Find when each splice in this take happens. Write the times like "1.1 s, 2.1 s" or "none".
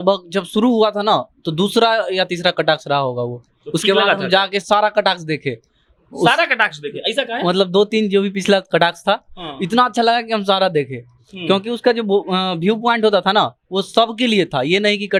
none